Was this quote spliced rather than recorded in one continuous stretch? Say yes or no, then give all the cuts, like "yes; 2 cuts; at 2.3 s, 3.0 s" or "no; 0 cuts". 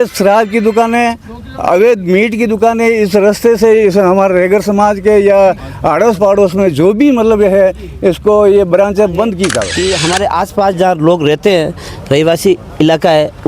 yes; 1 cut; at 9.7 s